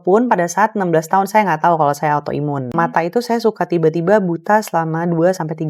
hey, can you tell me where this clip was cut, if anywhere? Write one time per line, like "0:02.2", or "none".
0:02.7

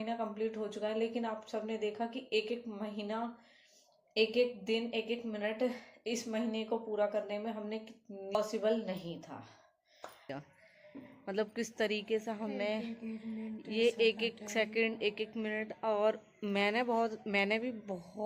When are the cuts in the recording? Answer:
0:08.4
0:10.3

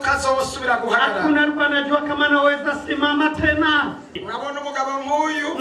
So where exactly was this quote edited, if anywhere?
0:04.2

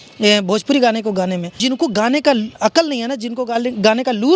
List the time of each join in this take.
0:01.6

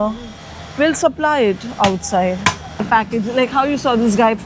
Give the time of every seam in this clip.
0:02.9

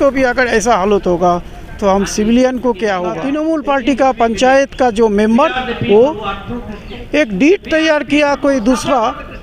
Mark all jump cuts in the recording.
0:03.1

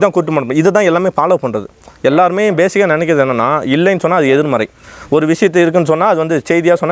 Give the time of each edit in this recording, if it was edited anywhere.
none

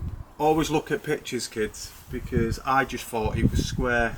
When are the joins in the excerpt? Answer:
none

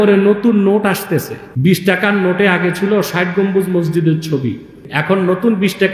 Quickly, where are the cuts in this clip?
0:01.4
0:04.9

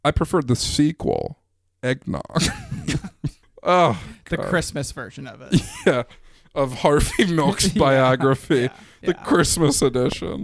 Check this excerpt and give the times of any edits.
0:03.5

